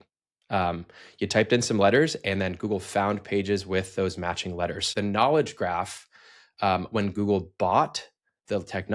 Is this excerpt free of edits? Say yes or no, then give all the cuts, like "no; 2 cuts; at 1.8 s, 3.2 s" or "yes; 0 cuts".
no; 1 cut; at 4.9 s